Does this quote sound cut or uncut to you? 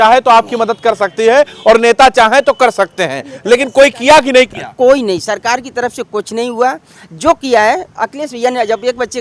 uncut